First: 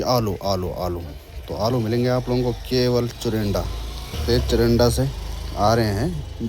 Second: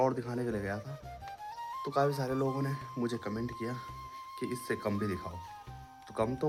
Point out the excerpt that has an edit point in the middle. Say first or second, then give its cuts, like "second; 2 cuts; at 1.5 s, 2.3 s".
first; 1 cut; at 4.2 s